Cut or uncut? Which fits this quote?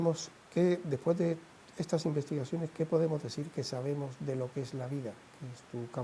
cut